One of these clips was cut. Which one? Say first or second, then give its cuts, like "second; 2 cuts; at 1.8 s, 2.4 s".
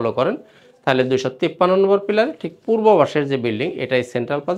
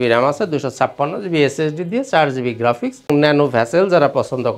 second; 1 cut; at 3.1 s